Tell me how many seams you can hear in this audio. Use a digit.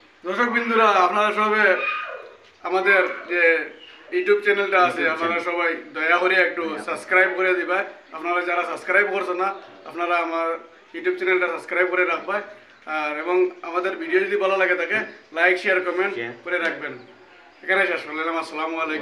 0